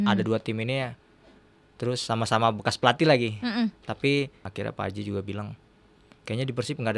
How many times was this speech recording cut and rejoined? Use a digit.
1